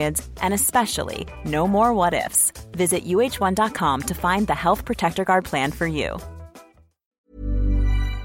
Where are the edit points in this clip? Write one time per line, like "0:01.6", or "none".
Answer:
0:07.1

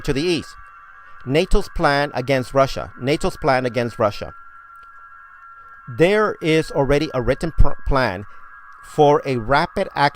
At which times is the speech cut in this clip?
0:05.5

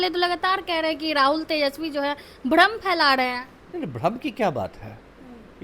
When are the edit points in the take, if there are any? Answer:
none

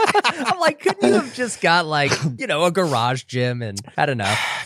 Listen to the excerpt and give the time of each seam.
0:02.3
0:03.8

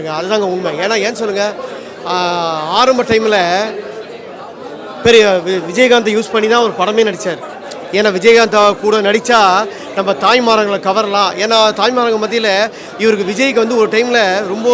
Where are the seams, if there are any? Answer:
none

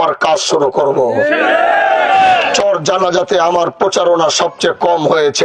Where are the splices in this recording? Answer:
0:02.5

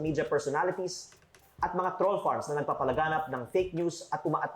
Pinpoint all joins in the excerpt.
0:01.0

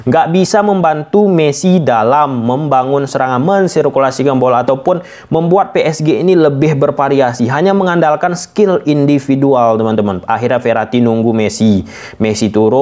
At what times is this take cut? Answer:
none

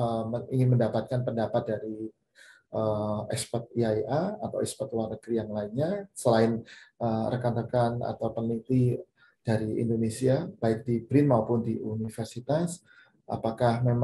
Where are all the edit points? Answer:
none

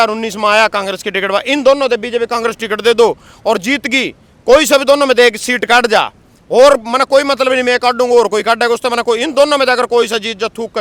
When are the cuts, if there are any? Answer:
none

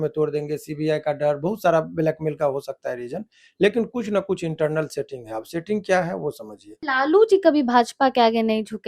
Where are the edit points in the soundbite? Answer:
0:06.8

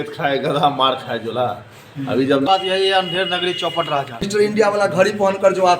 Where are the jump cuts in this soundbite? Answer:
0:02.5
0:04.2

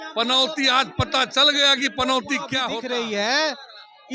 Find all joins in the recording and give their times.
0:02.6

